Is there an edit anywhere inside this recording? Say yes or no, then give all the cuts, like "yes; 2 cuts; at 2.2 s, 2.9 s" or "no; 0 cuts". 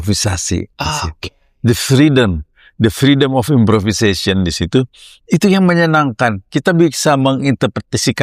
no; 0 cuts